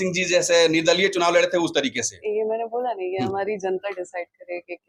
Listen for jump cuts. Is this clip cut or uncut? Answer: uncut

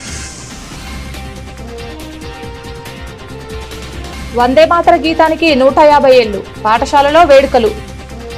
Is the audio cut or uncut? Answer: cut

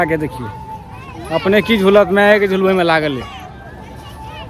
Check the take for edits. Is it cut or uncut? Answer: uncut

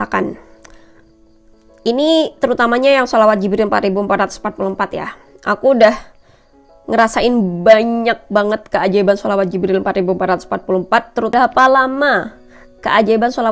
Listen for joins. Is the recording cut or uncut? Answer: cut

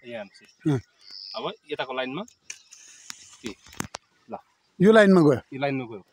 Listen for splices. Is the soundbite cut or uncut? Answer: uncut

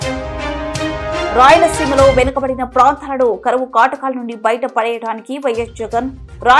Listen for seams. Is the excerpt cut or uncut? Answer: uncut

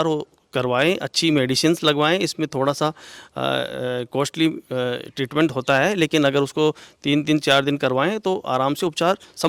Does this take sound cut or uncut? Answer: uncut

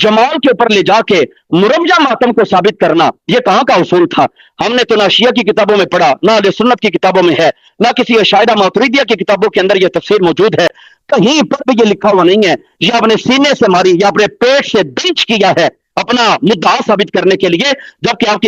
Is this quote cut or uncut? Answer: uncut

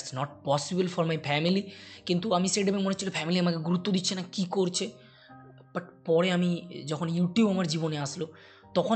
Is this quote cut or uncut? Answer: uncut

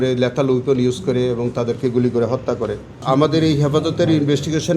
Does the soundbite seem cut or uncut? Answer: cut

